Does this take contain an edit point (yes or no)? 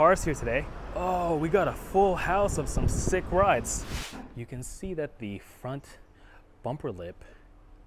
yes